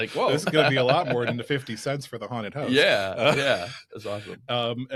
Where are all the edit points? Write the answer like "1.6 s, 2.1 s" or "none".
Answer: none